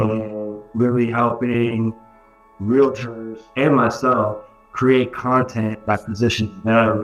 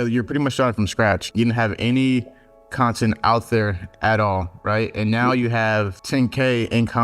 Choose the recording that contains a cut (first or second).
second